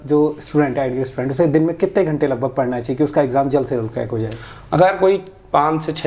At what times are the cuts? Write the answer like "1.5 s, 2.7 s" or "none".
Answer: none